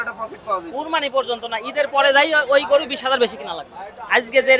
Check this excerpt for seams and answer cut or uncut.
uncut